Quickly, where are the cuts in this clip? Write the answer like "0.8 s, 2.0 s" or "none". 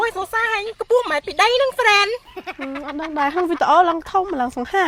none